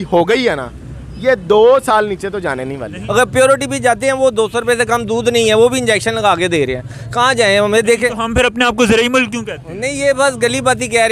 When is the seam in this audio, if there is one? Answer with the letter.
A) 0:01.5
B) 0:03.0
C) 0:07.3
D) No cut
B